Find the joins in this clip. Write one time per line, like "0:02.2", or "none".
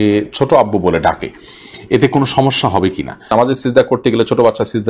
0:03.3